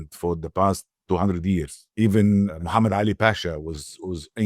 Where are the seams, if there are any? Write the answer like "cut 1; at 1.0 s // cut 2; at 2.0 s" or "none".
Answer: cut 1; at 1.8 s // cut 2; at 2.6 s